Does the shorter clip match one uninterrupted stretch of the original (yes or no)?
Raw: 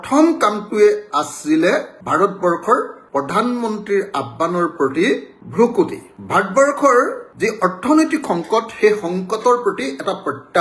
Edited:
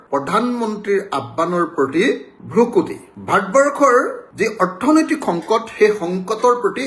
yes